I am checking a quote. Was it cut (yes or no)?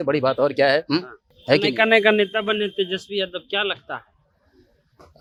no